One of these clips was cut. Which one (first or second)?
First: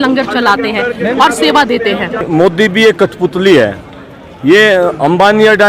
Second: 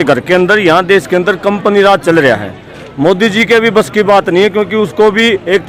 first